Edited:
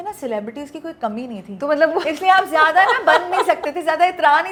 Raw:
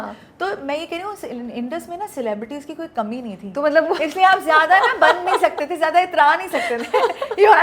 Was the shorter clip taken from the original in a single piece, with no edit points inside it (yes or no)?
yes